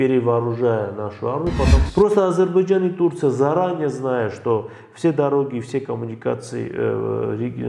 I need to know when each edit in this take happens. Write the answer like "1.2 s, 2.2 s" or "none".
1.8 s